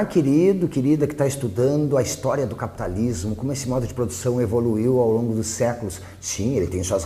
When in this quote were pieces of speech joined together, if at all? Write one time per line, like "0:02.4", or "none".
0:04.4